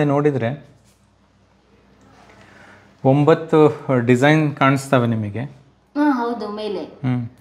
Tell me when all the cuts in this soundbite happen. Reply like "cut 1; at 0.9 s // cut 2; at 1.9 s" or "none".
none